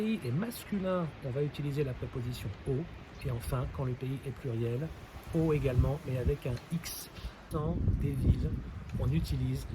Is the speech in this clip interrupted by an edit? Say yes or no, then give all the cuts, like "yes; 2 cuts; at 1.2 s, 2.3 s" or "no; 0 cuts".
yes; 1 cut; at 7.5 s